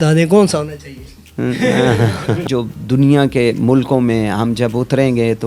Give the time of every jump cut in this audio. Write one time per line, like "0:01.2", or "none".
0:02.4

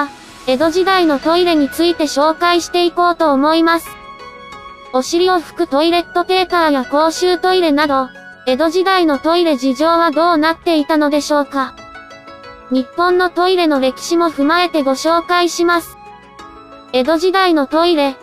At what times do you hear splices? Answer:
0:06.5

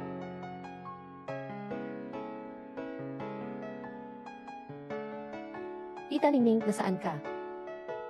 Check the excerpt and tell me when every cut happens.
0:04.4
0:06.1
0:07.2

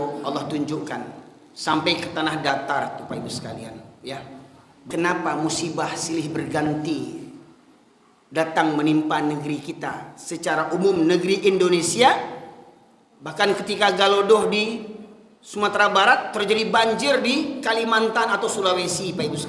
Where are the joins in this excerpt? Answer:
0:04.8

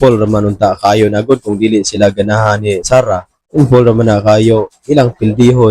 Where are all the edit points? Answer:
0:03.4

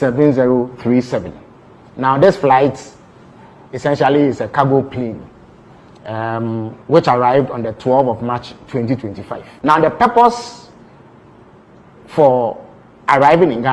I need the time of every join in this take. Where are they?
none

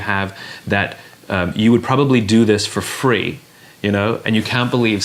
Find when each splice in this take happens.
none

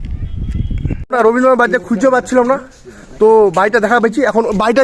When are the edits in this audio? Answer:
0:01.0

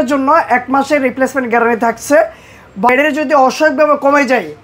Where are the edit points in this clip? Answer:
0:02.9

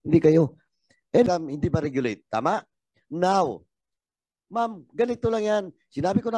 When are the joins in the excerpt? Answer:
0:01.2

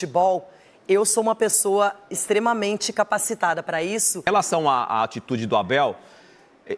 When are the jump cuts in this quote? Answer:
0:04.3

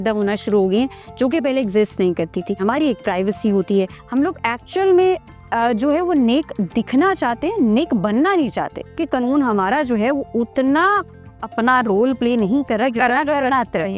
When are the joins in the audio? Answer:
0:02.6
0:04.0
0:09.0

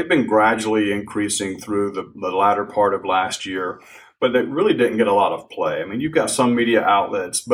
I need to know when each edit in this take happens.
none

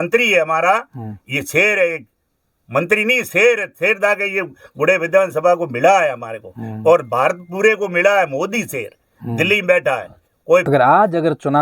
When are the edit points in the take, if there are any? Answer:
0:10.6

